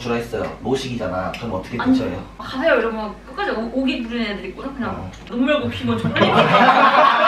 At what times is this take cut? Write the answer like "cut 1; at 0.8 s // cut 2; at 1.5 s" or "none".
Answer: none